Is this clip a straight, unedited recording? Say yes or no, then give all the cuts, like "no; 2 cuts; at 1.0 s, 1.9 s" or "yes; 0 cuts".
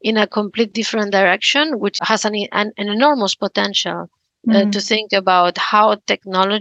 yes; 0 cuts